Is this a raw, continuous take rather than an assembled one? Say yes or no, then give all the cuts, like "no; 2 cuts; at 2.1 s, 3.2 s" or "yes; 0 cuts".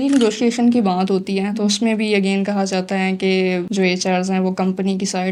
yes; 0 cuts